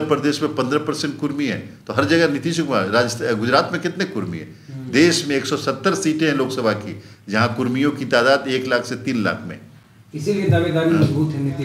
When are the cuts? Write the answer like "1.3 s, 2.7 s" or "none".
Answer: none